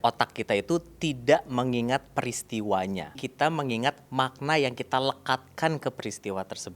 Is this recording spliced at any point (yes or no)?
yes